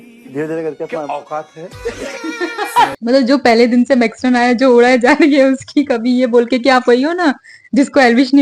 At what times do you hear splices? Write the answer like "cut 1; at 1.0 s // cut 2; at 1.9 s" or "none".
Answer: cut 1; at 2.9 s